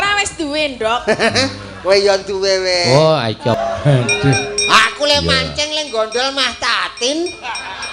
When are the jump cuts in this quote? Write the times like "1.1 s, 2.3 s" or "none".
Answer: 3.6 s